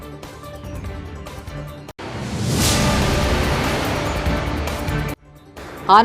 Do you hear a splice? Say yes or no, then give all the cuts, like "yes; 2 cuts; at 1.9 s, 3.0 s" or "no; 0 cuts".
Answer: yes; 1 cut; at 1.3 s